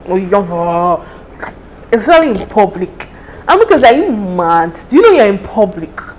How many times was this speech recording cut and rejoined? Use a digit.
0